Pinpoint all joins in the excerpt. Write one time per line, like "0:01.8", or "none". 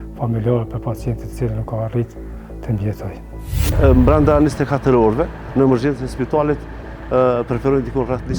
0:03.6